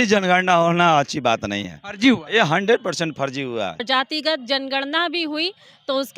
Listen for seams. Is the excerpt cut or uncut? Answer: cut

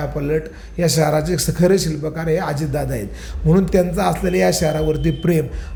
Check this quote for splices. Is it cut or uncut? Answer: uncut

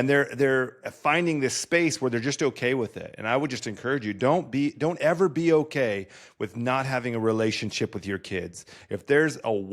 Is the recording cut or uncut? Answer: uncut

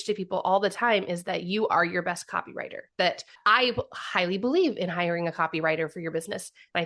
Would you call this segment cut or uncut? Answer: cut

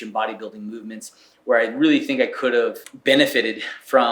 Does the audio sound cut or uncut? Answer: cut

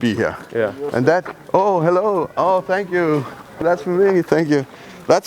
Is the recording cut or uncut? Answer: cut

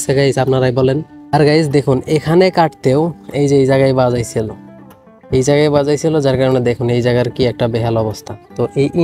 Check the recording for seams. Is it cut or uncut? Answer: uncut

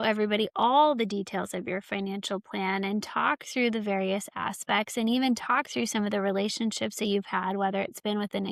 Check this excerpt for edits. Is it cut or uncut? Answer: uncut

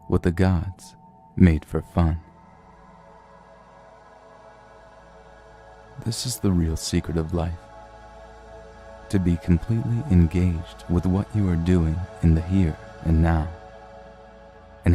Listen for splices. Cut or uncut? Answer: cut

